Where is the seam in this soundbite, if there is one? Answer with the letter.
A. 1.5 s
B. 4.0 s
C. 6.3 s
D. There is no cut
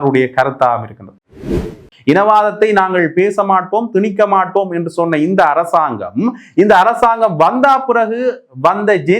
A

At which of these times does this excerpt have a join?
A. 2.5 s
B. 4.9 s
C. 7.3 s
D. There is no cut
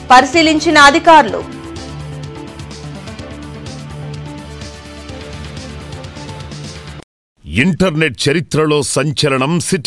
C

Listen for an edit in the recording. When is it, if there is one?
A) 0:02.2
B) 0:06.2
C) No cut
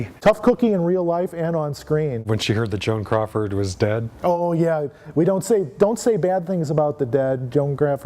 A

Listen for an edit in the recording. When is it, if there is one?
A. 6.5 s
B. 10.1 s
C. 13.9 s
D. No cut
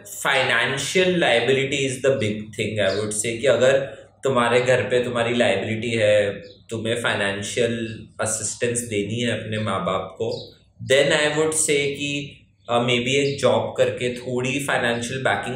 D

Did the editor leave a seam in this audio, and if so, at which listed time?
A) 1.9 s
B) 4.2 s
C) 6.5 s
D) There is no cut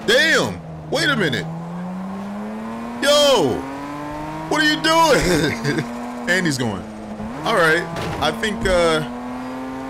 D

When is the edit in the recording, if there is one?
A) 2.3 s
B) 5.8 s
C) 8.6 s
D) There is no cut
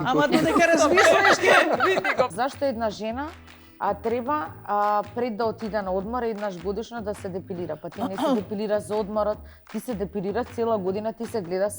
A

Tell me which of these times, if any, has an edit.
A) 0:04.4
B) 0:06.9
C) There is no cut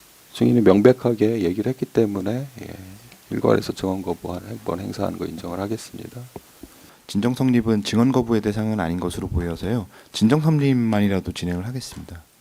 B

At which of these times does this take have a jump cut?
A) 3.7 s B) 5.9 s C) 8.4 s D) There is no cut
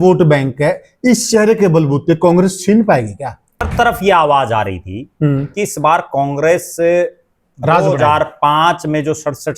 A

